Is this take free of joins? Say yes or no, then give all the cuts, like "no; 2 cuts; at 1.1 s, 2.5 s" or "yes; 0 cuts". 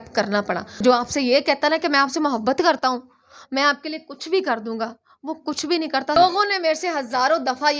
no; 2 cuts; at 0.8 s, 6.2 s